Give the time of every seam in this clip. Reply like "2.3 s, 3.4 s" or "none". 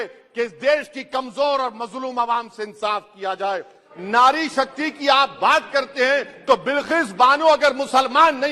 3.9 s